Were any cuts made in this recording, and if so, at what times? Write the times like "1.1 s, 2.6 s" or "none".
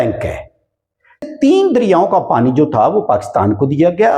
1.3 s